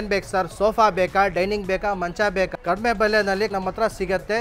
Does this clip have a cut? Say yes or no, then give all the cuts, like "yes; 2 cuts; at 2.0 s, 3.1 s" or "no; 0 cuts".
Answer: yes; 2 cuts; at 2.6 s, 3.5 s